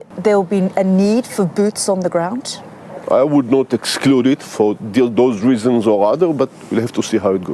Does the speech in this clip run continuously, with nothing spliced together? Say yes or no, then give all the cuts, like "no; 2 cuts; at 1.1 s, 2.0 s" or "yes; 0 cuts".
yes; 0 cuts